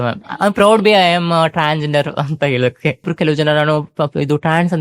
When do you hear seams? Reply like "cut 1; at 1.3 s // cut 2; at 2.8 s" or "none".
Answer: cut 1; at 3.1 s